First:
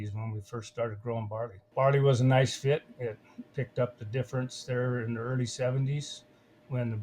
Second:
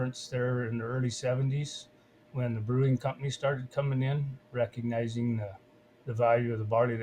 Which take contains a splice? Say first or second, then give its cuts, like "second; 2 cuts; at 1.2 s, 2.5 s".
first; 1 cut; at 1.6 s